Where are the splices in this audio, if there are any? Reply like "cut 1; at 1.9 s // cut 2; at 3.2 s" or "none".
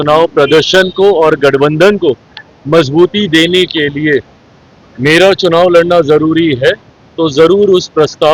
none